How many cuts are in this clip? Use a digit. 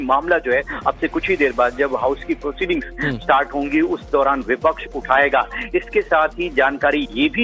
1